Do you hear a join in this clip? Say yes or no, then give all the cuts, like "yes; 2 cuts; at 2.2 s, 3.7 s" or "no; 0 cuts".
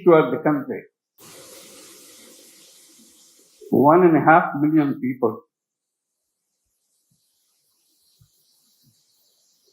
yes; 1 cut; at 1.1 s